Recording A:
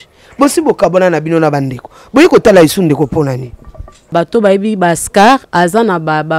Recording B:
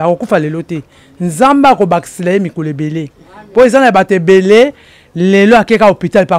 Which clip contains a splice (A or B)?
A